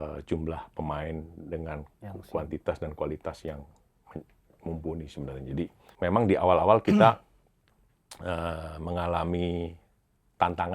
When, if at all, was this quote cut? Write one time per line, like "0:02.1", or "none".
0:05.9